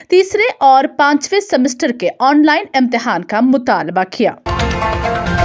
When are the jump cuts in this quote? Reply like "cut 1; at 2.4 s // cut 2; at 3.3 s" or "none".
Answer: cut 1; at 4.5 s